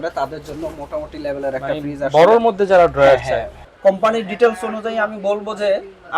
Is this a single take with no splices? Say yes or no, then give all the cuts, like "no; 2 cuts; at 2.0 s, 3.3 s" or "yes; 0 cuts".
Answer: no; 1 cut; at 3.7 s